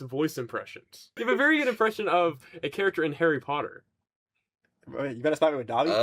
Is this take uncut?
no; 1 cut; at 1.1 s

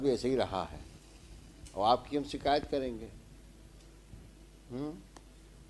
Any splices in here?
no; 0 cuts

